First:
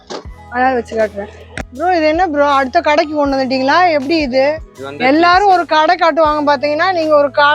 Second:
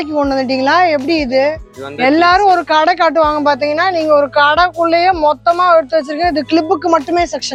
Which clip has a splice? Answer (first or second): first